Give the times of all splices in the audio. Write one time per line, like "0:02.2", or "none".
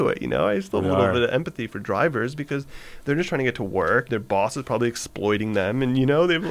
0:04.1